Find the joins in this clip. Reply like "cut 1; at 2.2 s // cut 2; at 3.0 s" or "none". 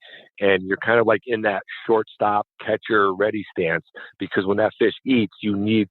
none